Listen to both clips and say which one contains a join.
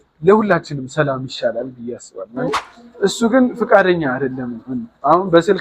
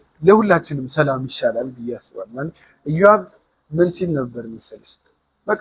first; 1 cut; at 2.4 s

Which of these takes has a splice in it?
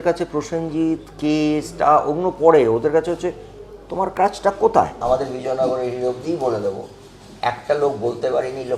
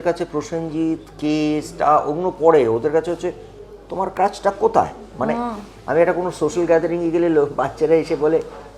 first; 1 cut; at 5.0 s

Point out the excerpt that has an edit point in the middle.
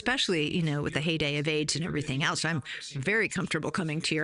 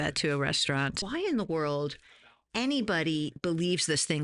second; 1 cut; at 1.0 s

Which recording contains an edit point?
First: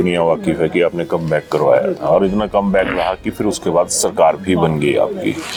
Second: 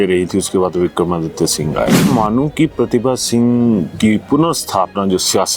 second; 1 cut; at 2.1 s

